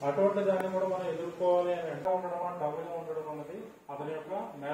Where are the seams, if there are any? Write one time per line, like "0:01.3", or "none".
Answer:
0:02.0